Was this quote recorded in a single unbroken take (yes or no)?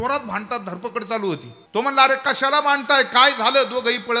no